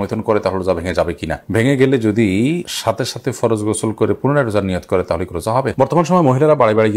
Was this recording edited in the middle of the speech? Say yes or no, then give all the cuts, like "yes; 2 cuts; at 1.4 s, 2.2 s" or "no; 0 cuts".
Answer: yes; 1 cut; at 5.7 s